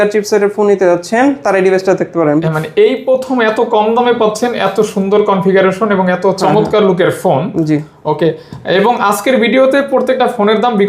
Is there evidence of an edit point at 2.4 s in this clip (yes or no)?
yes